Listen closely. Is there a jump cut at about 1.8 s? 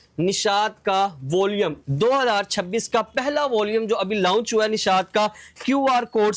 yes; 1 cut; at 1.8 s

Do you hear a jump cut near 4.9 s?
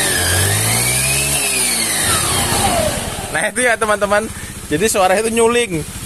no; 1 cut; at 2.1 s

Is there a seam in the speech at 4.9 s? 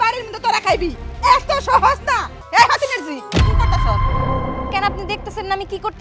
no; 1 cut; at 2.3 s

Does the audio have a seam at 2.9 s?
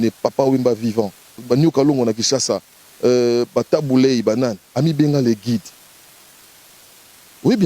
no; 1 cut; at 1.4 s

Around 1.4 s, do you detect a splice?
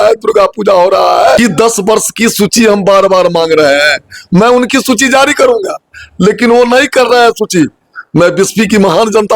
yes; 1 cut; at 1.4 s

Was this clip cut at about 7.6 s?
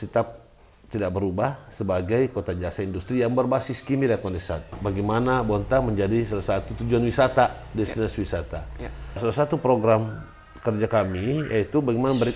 no; 2 cuts; at 4.7 s, 9.2 s

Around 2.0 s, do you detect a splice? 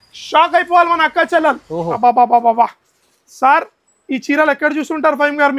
yes; 1 cut; at 2.0 s

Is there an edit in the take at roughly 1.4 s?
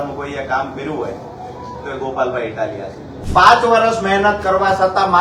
no; 1 cut; at 3.1 s

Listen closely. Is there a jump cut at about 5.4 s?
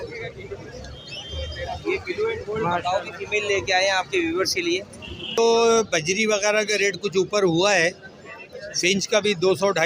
yes; 1 cut; at 5.4 s

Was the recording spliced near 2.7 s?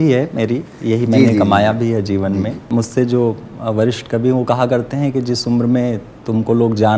yes; 1 cut; at 2.7 s

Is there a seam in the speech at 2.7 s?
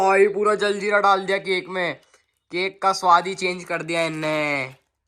no; 0 cuts

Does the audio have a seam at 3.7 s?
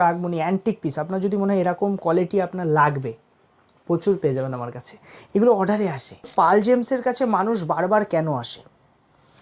no; 1 cut; at 6.3 s

